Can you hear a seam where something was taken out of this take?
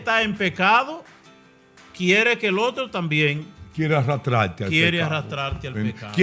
no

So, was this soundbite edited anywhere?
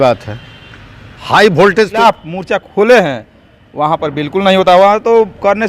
yes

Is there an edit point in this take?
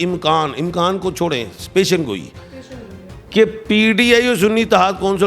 no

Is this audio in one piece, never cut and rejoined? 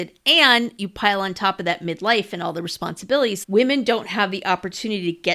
no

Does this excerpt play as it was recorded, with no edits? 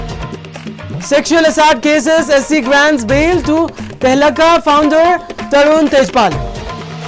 yes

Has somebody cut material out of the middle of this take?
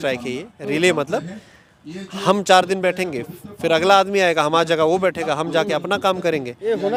no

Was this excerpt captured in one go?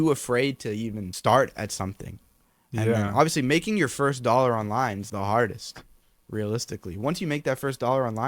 no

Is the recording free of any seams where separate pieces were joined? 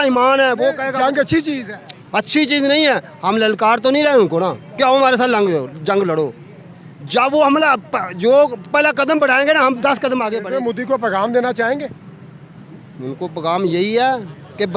no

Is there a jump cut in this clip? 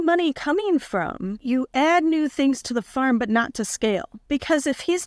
yes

